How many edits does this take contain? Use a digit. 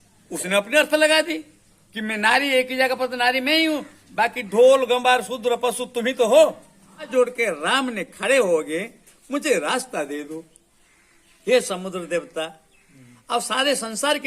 1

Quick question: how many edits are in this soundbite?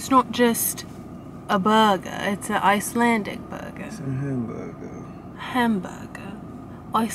0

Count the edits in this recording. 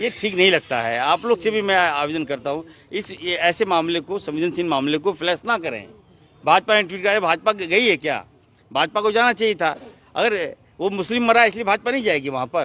0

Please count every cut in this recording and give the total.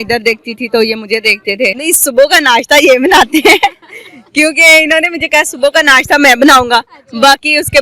1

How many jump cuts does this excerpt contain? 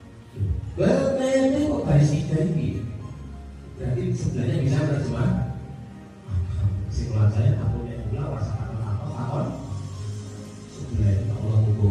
0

